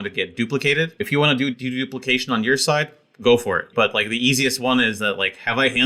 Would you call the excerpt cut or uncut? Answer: cut